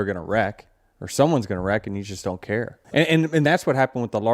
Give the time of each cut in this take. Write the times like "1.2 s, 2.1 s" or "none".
2.8 s